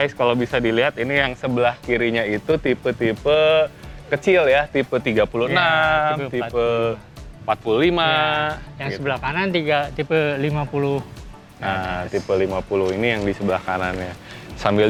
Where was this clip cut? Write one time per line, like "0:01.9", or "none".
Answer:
none